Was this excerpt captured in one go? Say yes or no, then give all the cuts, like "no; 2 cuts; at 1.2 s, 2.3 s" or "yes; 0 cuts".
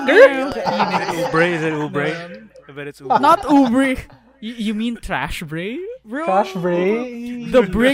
yes; 0 cuts